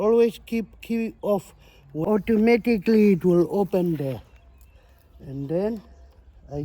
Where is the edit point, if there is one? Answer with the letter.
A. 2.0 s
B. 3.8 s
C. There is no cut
A